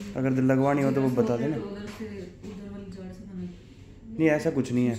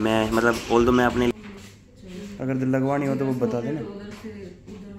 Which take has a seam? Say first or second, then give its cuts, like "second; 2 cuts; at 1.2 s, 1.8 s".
second; 1 cut; at 1.3 s